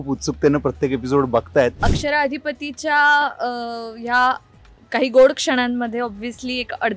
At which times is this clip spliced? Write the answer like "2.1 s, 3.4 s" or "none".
1.9 s